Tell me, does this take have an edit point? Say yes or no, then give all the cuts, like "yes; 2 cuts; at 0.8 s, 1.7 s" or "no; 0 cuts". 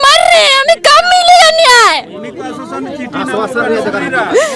no; 0 cuts